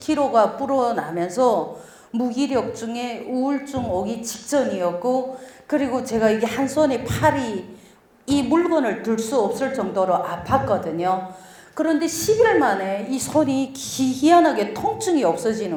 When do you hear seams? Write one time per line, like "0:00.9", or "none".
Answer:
none